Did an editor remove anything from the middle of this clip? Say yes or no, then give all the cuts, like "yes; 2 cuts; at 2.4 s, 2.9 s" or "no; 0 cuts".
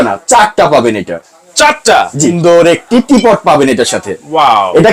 yes; 1 cut; at 2.4 s